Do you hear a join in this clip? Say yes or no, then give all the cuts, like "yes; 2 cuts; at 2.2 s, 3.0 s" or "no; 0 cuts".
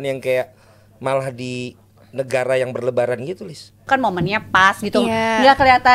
yes; 1 cut; at 3.8 s